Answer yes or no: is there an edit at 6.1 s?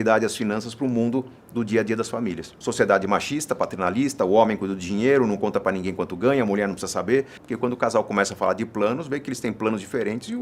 no